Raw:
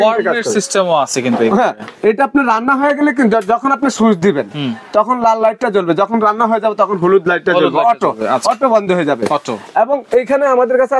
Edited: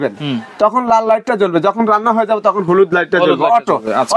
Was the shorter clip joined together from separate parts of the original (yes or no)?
no